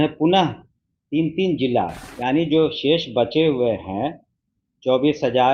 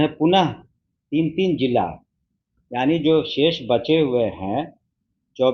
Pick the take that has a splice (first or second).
first